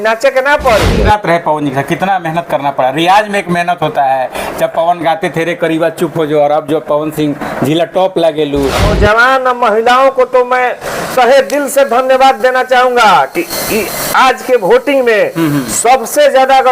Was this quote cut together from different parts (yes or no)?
yes